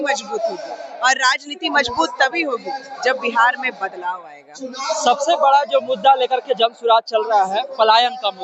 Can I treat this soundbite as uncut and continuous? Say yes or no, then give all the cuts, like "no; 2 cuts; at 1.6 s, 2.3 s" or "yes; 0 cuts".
yes; 0 cuts